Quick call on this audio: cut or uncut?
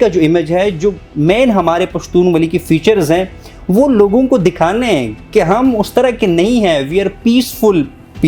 uncut